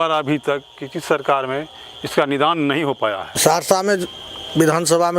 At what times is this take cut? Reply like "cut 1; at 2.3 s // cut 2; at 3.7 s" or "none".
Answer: cut 1; at 3.3 s

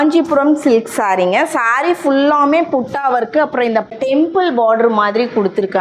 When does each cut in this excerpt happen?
cut 1; at 3.9 s

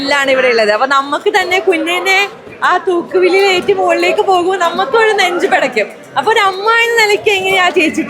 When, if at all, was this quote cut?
none

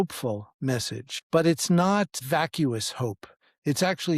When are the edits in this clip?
cut 1; at 1.1 s // cut 2; at 2.2 s

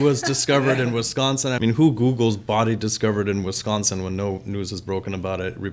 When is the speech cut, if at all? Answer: cut 1; at 1.6 s

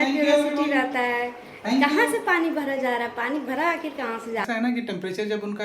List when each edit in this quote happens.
cut 1; at 4.4 s

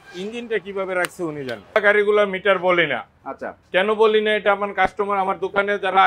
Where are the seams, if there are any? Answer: cut 1; at 1.8 s

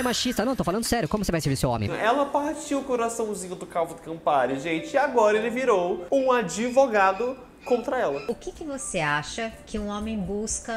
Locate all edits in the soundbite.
cut 1; at 2.0 s // cut 2; at 8.2 s

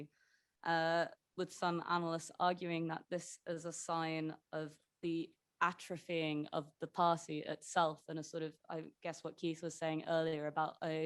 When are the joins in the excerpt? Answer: none

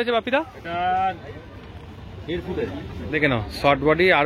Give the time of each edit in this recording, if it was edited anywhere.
cut 1; at 3.1 s

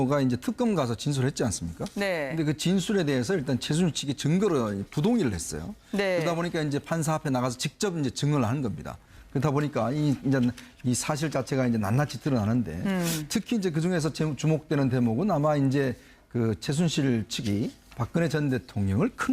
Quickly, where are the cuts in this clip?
cut 1; at 17.3 s

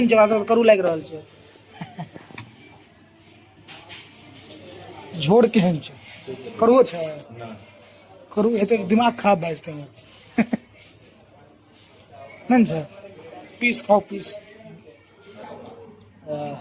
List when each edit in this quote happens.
cut 1; at 15.4 s

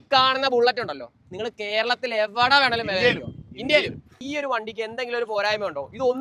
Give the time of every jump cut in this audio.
cut 1; at 4.1 s

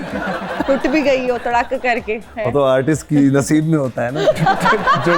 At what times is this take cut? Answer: cut 1; at 2.3 s

